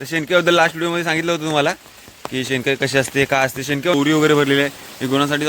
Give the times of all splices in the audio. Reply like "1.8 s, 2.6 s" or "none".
3.9 s